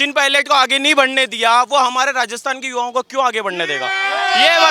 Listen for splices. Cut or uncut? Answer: uncut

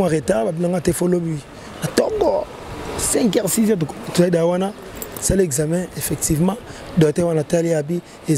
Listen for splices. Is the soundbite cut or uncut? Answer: uncut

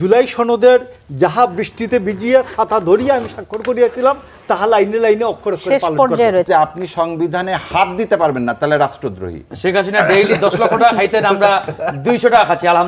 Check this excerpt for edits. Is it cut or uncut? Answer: cut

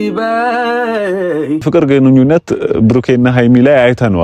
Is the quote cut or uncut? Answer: cut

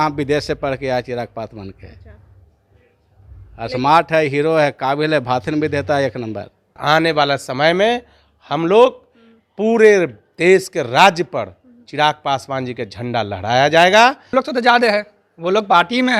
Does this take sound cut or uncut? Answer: cut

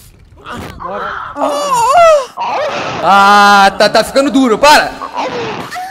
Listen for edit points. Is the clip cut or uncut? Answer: cut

